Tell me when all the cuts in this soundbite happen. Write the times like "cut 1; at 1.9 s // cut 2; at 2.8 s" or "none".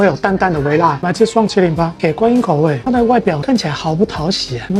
cut 1; at 1.0 s